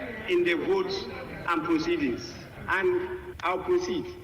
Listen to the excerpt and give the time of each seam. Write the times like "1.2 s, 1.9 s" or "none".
3.3 s